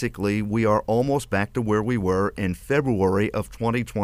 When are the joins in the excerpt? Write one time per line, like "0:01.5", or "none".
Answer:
none